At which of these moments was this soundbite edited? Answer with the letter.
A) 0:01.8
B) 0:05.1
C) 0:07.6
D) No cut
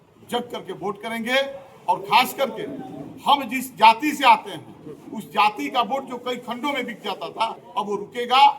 C